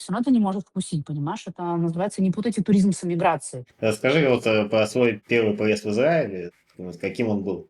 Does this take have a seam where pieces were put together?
no; 0 cuts

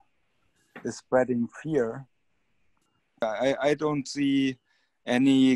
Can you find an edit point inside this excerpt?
yes; 1 cut; at 3.2 s

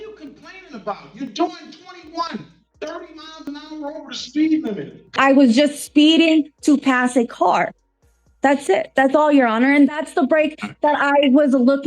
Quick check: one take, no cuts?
no; 1 cut; at 5.1 s

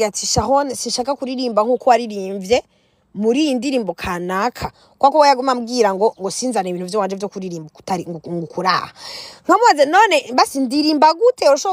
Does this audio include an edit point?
no; 0 cuts

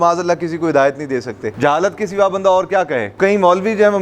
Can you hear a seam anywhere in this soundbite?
yes; 2 cuts; at 1.5 s, 3.1 s

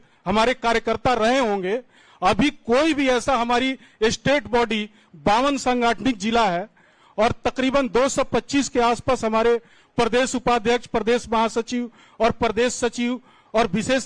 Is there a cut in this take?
no; 0 cuts

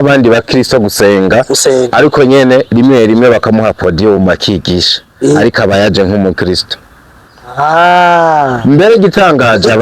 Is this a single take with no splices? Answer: yes; 0 cuts

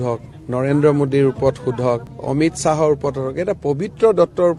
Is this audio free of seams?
yes; 0 cuts

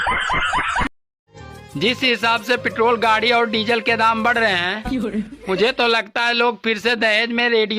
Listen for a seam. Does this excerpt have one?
yes; 1 cut; at 1.2 s

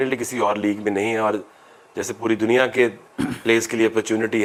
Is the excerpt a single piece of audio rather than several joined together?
yes; 0 cuts

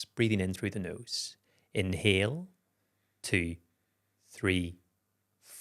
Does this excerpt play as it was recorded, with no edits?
yes; 0 cuts

